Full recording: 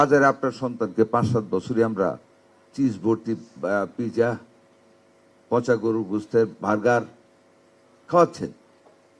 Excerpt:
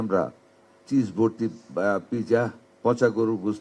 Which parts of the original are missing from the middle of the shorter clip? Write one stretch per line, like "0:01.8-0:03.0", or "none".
0:04.5-0:05.3